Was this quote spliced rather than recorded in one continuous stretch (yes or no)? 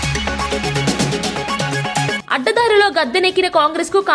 yes